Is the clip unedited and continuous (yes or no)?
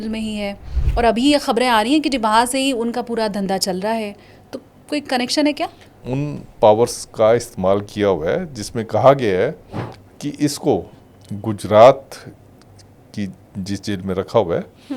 no